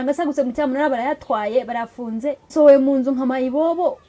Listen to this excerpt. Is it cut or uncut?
cut